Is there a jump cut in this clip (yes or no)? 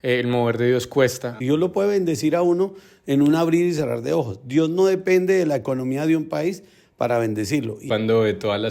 yes